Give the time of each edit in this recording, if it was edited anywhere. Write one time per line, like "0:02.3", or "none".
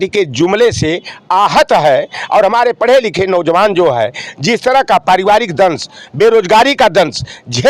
none